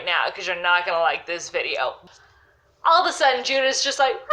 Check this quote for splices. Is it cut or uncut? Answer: cut